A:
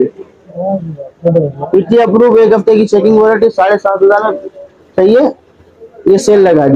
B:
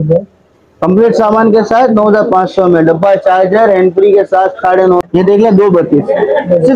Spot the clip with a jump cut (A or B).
B